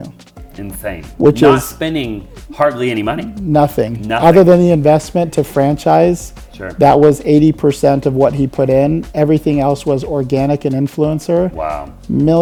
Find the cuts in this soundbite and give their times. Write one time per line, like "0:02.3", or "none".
none